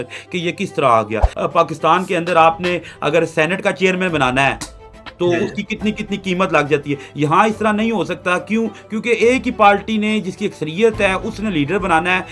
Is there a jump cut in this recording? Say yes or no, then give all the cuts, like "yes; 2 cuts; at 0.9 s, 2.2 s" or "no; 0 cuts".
yes; 1 cut; at 1.3 s